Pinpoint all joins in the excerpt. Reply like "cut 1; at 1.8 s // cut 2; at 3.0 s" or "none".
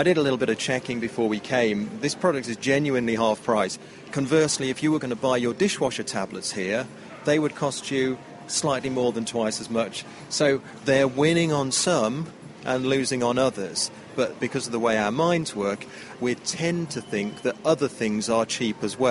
cut 1; at 10.3 s // cut 2; at 14.4 s // cut 3; at 16.1 s

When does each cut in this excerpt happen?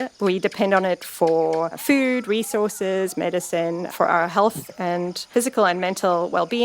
cut 1; at 1.8 s // cut 2; at 3.9 s // cut 3; at 5.3 s

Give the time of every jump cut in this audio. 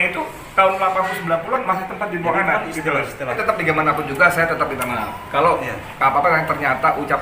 cut 1; at 3.4 s

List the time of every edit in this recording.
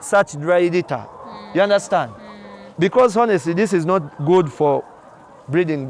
none

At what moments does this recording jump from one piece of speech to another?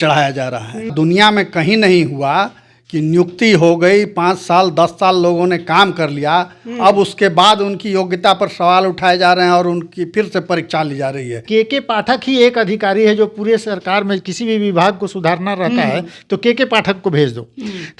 cut 1; at 0.9 s // cut 2; at 11.4 s

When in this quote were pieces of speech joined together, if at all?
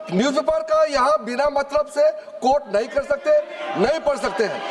none

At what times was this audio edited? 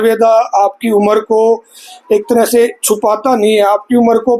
none

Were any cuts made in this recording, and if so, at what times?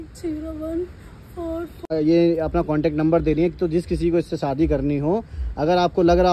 cut 1; at 1.9 s

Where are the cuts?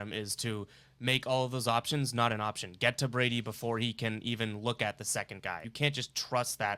cut 1; at 5.7 s

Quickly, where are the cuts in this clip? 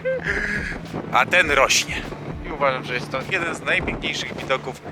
cut 1; at 2.4 s

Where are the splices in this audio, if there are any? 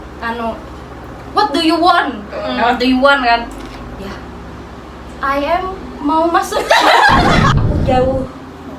cut 1; at 7.5 s

